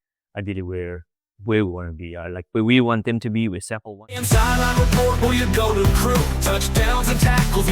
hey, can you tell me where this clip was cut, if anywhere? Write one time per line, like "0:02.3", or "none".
0:04.1